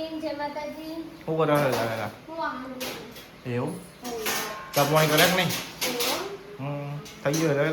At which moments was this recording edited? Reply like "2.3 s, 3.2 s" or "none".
none